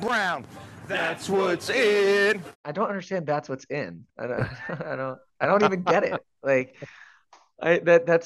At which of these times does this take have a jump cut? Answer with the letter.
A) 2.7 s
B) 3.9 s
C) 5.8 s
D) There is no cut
A